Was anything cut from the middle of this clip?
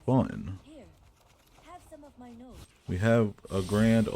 yes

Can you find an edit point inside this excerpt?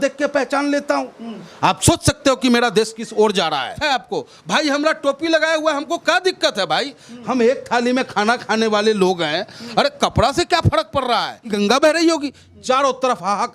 yes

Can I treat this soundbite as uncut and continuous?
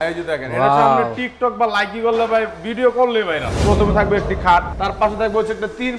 no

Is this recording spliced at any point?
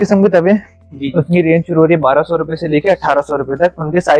no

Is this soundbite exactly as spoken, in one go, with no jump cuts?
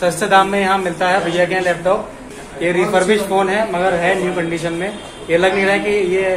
no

